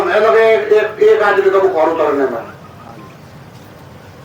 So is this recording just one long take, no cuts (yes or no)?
yes